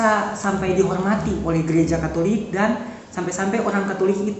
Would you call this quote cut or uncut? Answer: uncut